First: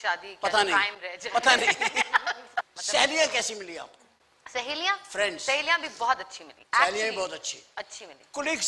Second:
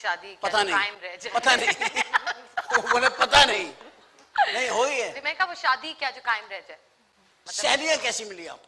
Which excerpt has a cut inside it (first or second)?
first